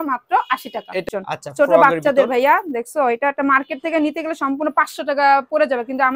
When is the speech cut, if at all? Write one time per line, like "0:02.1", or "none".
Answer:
0:01.0